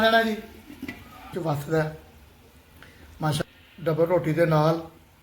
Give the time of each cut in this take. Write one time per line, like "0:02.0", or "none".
0:01.3
0:03.4

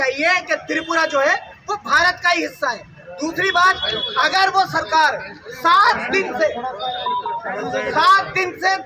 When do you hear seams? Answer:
none

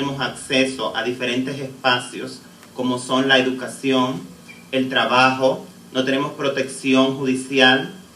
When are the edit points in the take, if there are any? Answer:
0:07.0

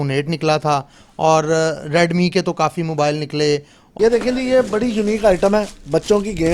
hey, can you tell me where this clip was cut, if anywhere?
0:03.9

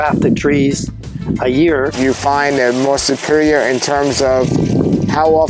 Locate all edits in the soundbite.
0:01.9

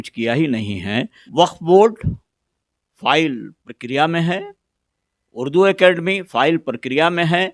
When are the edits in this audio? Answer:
0:01.2

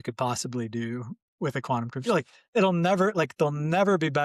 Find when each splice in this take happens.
none

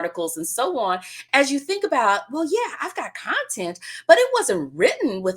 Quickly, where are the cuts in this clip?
0:01.1

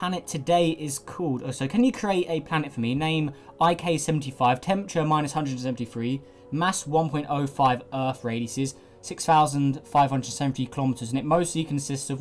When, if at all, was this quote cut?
0:02.3

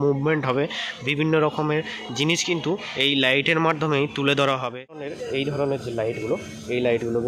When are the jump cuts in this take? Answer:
0:05.1

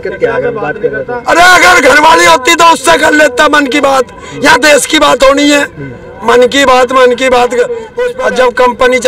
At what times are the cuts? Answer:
0:07.9

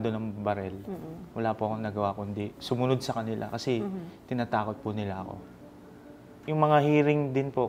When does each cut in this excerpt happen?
0:06.4

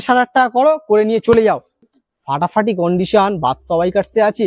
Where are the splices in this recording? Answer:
0:01.8

